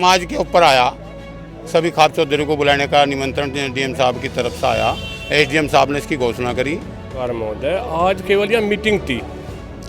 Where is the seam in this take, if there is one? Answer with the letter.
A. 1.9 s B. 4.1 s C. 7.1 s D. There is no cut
C